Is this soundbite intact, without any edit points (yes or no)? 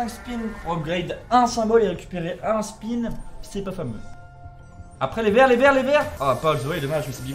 yes